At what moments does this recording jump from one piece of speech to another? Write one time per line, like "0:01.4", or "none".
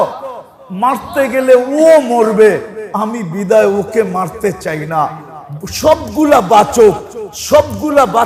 none